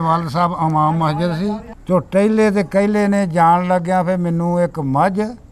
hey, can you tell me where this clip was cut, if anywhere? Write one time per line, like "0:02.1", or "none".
0:01.7